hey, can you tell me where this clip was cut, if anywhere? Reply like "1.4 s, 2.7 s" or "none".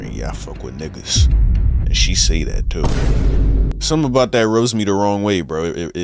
3.7 s